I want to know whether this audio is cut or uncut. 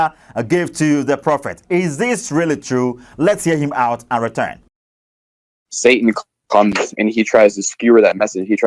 uncut